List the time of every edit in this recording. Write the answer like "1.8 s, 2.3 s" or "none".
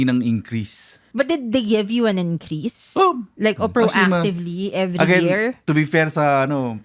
1.0 s